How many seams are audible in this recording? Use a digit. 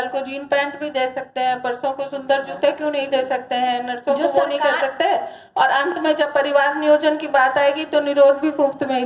0